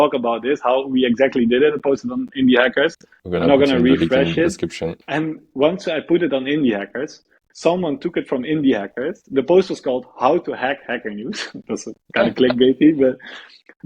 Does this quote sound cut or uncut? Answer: cut